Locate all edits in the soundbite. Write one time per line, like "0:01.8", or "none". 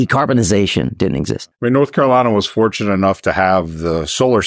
0:01.4